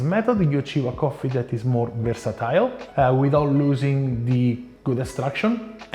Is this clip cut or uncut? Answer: cut